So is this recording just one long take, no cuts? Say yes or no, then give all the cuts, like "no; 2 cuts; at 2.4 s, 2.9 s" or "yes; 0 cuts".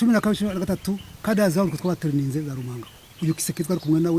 no; 1 cut; at 3.1 s